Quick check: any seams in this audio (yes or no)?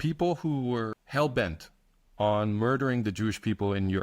yes